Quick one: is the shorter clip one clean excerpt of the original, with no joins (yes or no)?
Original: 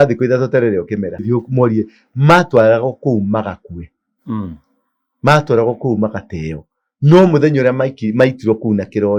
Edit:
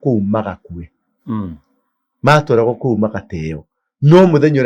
yes